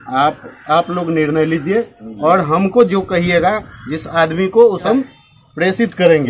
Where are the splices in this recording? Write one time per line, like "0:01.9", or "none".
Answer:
0:04.9